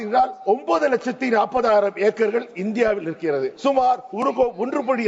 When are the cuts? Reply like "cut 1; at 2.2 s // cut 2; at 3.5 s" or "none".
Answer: cut 1; at 3.5 s